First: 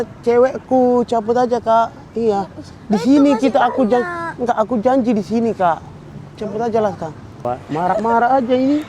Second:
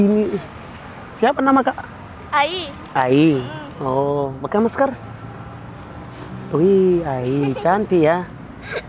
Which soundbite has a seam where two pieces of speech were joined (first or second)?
first